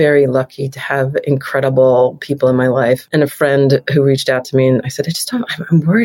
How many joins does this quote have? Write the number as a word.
one